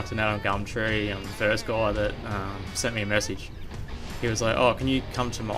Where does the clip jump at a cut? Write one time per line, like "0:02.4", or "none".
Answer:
0:01.3